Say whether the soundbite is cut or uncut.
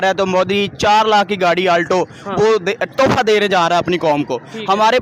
uncut